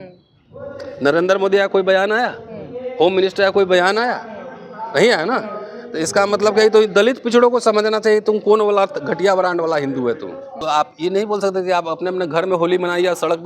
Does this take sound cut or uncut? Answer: cut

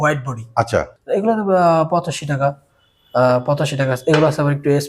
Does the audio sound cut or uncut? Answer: cut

